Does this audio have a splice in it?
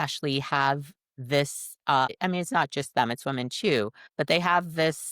yes; 2 cuts; at 2.1 s, 4.0 s

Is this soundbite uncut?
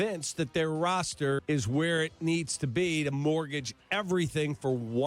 no; 1 cut; at 1.4 s

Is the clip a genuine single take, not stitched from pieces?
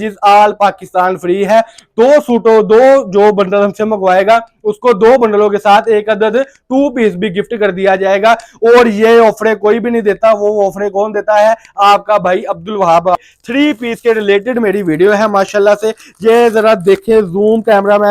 no; 1 cut; at 13.2 s

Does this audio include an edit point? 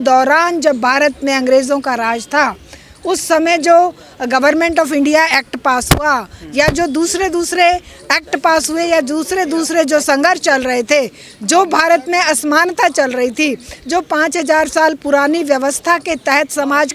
no; 0 cuts

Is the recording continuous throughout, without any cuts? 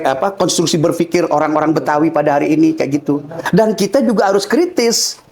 no; 1 cut; at 3.4 s

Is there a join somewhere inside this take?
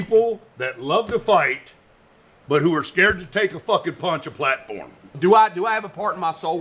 yes; 1 cut; at 5.1 s

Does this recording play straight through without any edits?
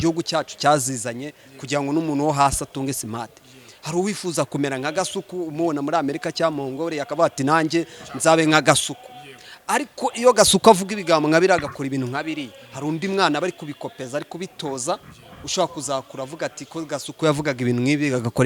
yes; 0 cuts

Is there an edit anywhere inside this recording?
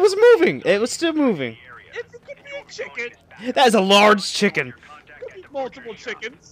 no; 0 cuts

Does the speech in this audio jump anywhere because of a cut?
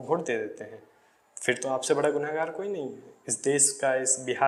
no; 0 cuts

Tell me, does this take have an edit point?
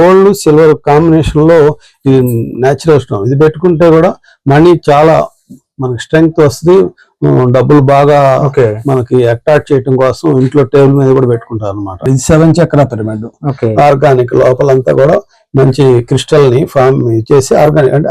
yes; 1 cut; at 12.0 s

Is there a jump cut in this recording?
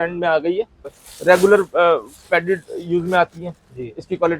yes; 1 cut; at 1.0 s

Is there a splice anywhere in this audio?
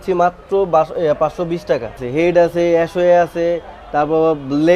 yes; 1 cut; at 2.0 s

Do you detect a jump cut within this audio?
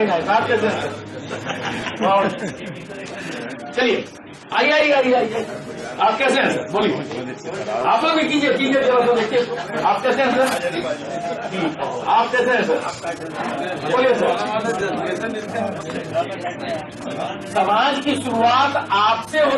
yes; 1 cut; at 17.3 s

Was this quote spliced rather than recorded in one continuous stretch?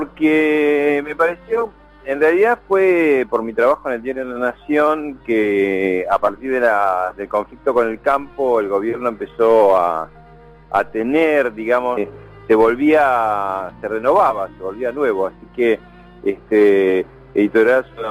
no; 0 cuts

